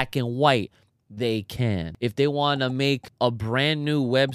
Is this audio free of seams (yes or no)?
no